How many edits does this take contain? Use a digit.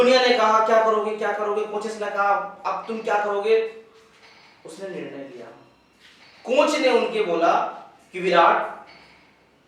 0